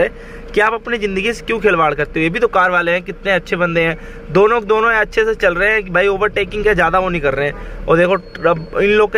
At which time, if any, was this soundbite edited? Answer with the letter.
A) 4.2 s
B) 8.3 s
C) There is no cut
C